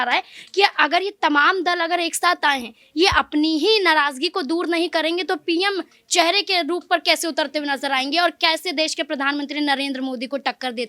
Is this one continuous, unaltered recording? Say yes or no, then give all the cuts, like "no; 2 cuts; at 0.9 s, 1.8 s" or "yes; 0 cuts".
yes; 0 cuts